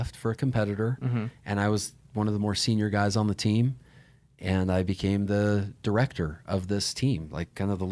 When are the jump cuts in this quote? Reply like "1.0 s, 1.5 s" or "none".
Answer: none